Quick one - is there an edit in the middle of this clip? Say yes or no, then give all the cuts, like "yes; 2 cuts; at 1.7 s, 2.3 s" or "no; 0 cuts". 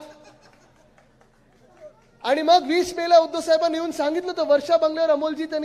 no; 0 cuts